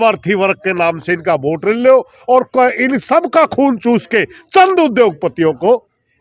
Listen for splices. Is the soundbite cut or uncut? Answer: uncut